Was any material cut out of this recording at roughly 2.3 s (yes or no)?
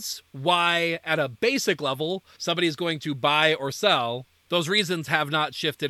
yes